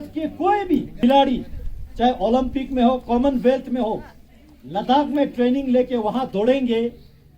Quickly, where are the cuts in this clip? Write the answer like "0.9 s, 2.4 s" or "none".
0.9 s